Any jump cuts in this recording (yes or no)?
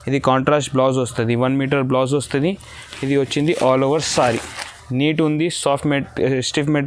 no